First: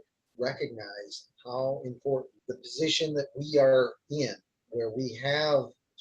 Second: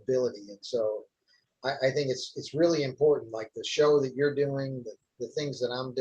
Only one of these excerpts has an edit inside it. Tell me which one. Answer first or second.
first